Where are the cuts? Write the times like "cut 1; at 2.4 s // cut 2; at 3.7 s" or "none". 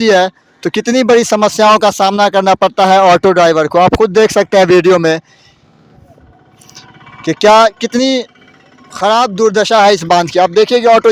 none